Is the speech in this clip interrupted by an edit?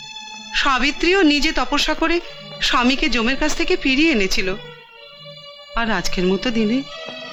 no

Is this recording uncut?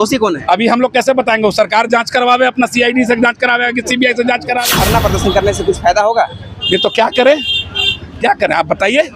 no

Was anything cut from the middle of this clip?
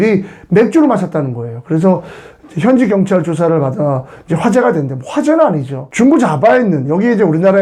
no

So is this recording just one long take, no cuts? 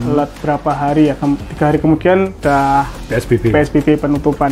no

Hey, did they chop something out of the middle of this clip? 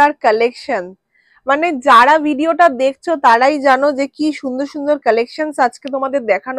no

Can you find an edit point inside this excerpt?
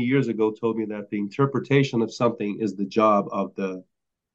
no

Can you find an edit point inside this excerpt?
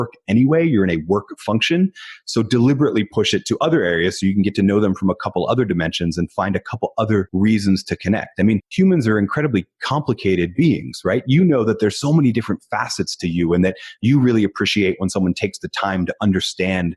yes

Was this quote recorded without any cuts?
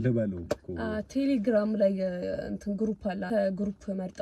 no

